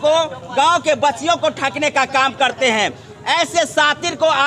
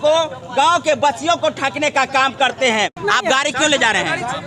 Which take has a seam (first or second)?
second